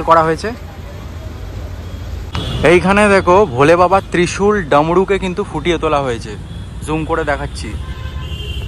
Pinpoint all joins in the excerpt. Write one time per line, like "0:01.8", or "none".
0:02.3